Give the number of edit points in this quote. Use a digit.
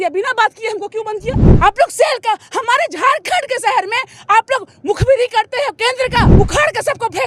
2